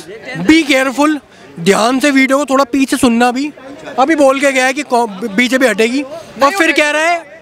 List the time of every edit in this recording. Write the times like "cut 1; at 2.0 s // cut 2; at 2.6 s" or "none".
none